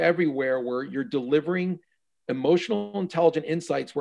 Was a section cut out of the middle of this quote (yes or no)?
no